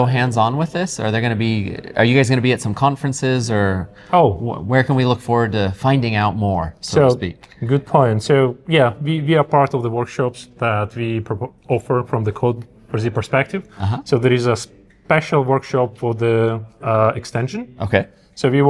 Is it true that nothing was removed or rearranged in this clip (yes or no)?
yes